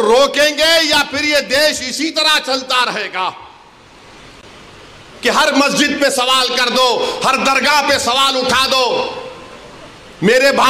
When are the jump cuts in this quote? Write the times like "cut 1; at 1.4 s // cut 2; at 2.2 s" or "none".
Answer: none